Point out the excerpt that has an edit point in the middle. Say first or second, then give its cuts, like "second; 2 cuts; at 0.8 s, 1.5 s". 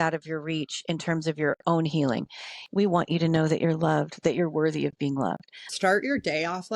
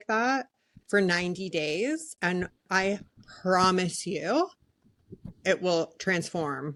first; 2 cuts; at 2.6 s, 5.6 s